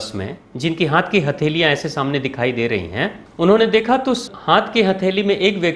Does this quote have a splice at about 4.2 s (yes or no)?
yes